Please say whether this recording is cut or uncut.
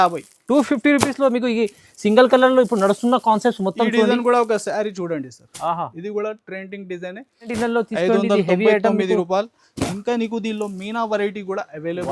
cut